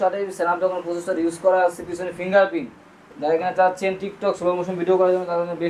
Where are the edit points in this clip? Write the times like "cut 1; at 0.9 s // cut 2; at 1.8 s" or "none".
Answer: cut 1; at 2.9 s